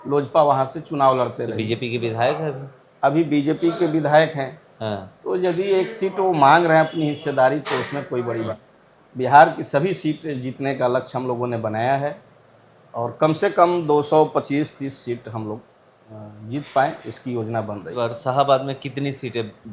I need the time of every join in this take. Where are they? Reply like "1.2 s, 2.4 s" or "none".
8.5 s, 17.9 s